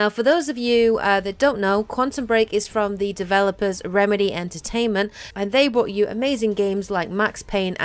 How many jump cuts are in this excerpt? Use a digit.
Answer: 0